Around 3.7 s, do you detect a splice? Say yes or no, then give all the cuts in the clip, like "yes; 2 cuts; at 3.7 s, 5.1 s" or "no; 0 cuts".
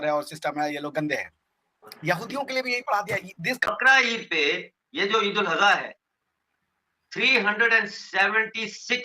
yes; 1 cut; at 3.7 s